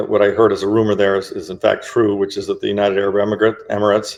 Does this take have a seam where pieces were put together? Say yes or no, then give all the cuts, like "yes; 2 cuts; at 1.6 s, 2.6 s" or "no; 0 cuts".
no; 0 cuts